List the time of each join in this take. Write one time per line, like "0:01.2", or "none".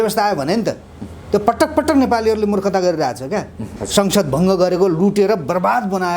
0:03.8